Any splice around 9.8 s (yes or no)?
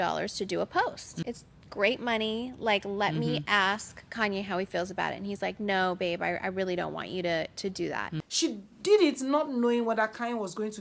no